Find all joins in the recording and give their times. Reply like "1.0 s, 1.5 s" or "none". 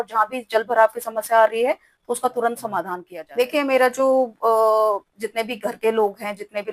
3.0 s